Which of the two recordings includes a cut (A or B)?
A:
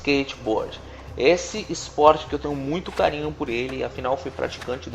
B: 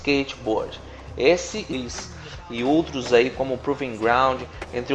A